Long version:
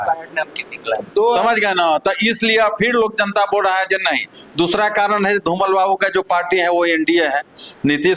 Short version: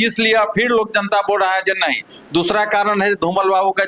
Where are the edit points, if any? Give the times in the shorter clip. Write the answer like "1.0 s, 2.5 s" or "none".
none